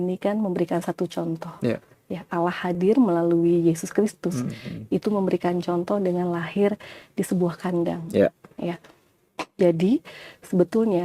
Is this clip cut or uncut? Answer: uncut